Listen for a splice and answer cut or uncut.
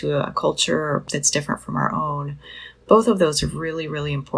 cut